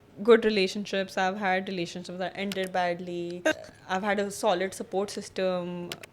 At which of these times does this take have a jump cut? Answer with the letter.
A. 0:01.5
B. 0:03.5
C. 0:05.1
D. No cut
B